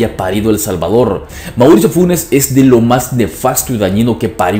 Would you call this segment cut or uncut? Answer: cut